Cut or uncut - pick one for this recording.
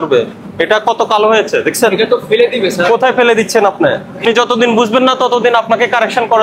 cut